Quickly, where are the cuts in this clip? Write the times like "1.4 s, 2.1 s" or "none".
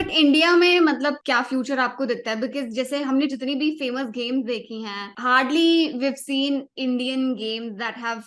1.2 s, 5.1 s